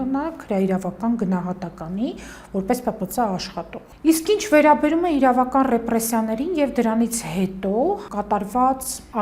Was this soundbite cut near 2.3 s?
no; 0 cuts

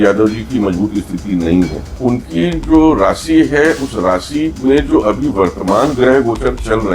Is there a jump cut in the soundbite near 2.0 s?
yes; 1 cut; at 2.0 s

